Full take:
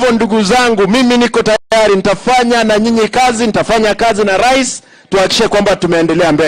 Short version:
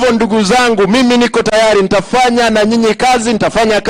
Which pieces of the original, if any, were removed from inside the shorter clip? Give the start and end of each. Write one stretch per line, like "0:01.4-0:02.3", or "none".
0:01.5-0:01.6